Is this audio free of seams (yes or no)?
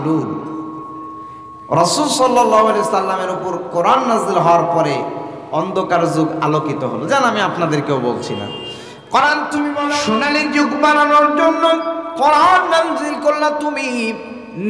no